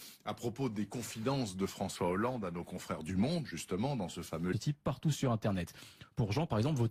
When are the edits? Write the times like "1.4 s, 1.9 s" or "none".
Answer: none